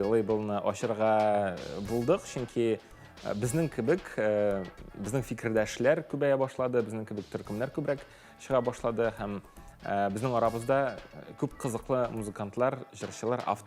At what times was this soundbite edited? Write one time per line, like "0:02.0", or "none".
none